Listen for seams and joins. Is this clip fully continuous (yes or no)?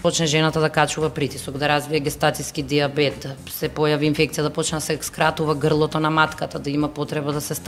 yes